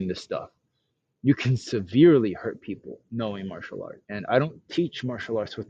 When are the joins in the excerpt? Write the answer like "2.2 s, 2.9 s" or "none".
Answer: 4.0 s